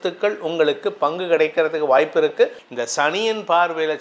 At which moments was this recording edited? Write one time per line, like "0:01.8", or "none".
0:02.7